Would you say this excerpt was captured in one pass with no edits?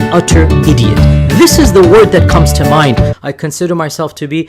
no; 1 cut; at 3.1 s

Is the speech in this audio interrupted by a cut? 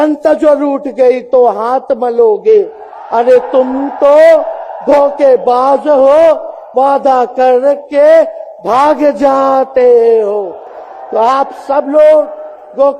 no; 0 cuts

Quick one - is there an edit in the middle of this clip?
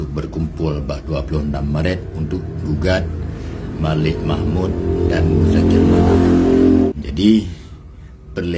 yes; 1 cut; at 6.9 s

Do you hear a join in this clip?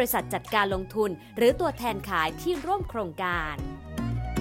yes; 1 cut; at 3.4 s

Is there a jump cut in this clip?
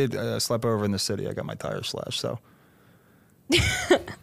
no; 0 cuts

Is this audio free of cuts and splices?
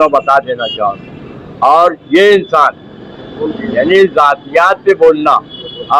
yes; 0 cuts

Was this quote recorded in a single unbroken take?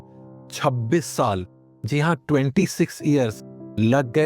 yes; 0 cuts

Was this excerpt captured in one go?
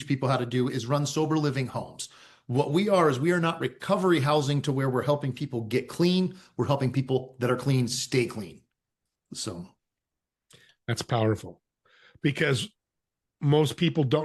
yes; 0 cuts

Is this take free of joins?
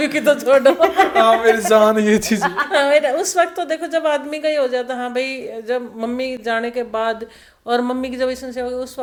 yes; 0 cuts

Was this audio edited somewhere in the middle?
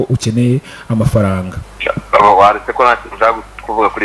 yes; 1 cut; at 1.6 s

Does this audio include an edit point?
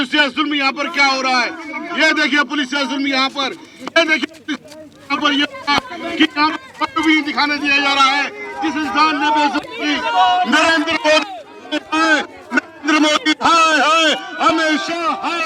no; 0 cuts

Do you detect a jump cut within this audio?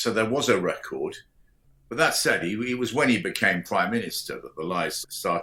no; 0 cuts

